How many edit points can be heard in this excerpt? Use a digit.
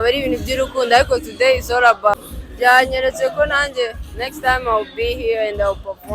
1